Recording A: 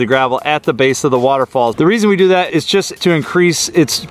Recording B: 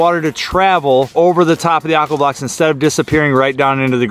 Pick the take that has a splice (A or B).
A